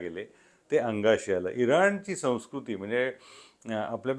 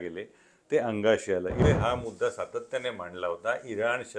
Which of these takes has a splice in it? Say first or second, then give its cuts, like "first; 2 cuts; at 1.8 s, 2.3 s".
second; 1 cut; at 1.6 s